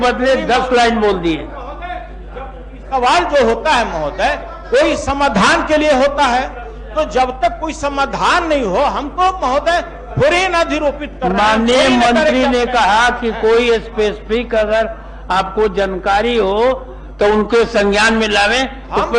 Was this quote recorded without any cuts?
yes; 0 cuts

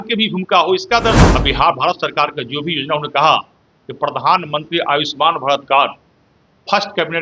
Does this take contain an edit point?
yes; 1 cut; at 1.3 s

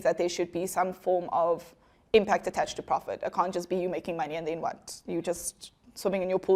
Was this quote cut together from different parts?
no; 0 cuts

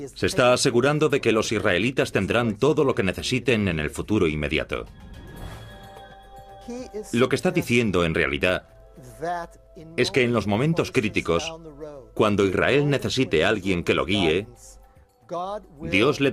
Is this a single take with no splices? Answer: yes; 0 cuts

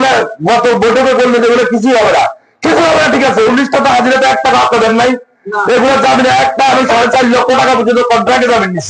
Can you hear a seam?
no; 0 cuts

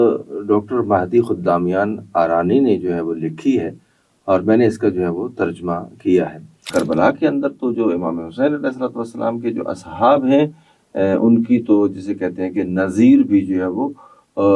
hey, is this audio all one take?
no; 1 cut; at 6.7 s

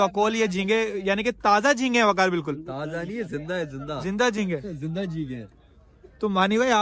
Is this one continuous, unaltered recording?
yes; 0 cuts

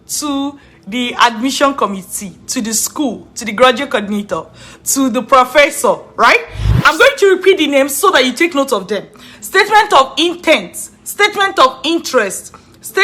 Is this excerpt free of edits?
no; 1 cut; at 6.6 s

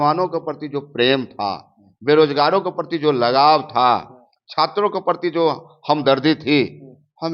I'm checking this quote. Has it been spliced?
no; 0 cuts

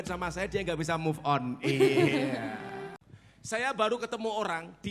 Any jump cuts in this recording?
yes; 1 cut; at 2.8 s

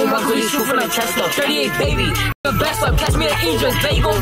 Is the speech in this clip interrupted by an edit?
no; 0 cuts

